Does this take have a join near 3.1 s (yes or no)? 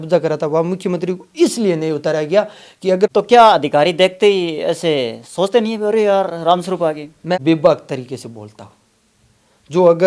yes